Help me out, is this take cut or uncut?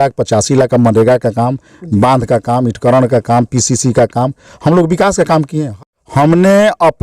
cut